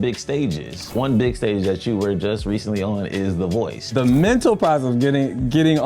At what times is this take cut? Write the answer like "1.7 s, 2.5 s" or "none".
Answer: 0.9 s, 3.9 s